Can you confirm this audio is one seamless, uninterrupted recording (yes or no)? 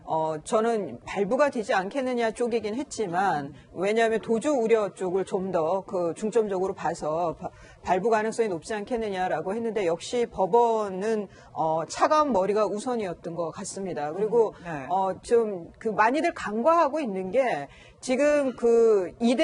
yes